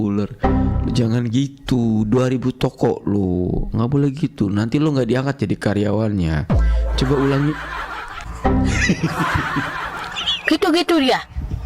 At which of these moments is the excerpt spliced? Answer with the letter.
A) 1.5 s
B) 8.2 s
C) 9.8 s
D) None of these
B